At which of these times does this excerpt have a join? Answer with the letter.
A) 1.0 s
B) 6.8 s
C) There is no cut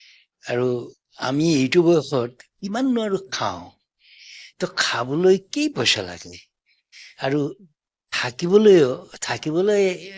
C